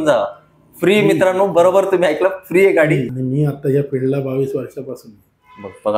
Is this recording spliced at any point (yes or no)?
yes